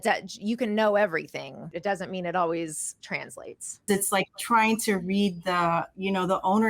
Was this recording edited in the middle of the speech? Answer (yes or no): yes